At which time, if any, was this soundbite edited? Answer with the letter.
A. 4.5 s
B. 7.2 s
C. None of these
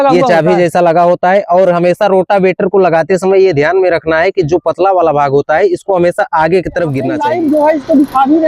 B